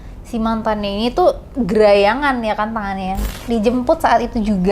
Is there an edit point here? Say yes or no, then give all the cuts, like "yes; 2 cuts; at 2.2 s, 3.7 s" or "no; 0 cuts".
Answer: yes; 1 cut; at 3.3 s